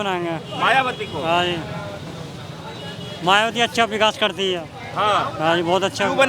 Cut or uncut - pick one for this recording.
uncut